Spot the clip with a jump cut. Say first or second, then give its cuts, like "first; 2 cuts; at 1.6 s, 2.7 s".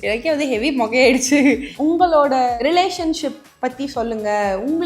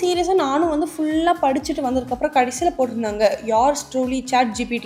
first; 2 cuts; at 1.7 s, 2.5 s